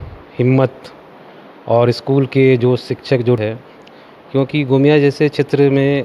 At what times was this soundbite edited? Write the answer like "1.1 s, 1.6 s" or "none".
3.4 s